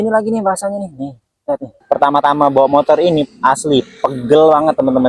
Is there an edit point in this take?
yes; 1 cut; at 1.8 s

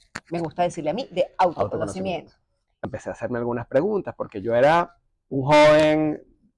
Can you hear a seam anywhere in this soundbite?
yes; 1 cut; at 2.7 s

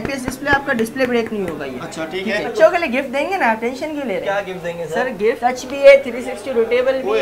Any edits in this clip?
yes; 2 cuts; at 2.5 s, 5.4 s

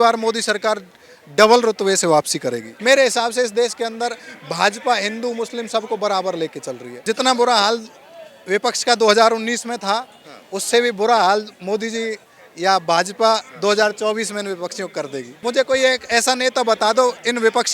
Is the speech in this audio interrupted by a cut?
yes; 3 cuts; at 2.7 s, 6.9 s, 15.3 s

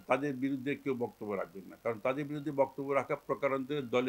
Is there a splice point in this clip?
no; 0 cuts

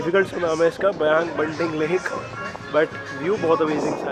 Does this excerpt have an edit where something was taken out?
no; 0 cuts

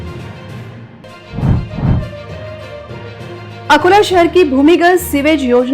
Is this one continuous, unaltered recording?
no; 1 cut; at 0.9 s

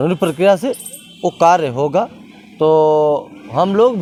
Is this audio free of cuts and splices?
yes; 0 cuts

